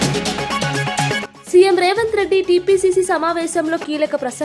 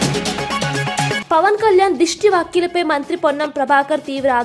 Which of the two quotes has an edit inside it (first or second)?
second